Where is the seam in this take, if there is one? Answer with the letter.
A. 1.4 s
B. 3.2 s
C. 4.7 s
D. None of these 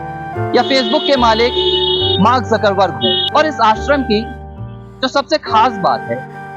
B